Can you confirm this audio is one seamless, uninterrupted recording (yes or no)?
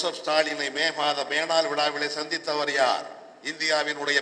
yes